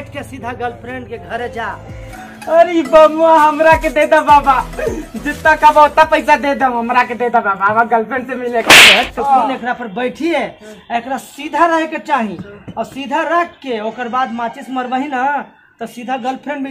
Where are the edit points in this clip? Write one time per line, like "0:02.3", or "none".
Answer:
0:02.1
0:09.2